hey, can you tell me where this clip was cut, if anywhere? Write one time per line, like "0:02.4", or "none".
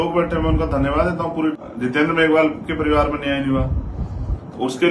0:01.6